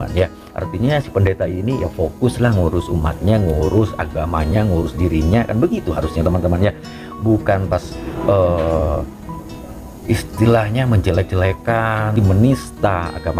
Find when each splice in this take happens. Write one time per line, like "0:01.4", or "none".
0:12.2